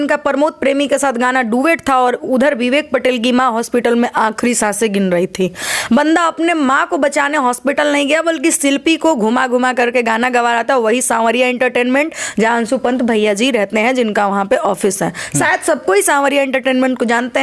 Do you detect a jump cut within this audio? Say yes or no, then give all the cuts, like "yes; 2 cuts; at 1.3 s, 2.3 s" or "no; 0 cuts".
no; 0 cuts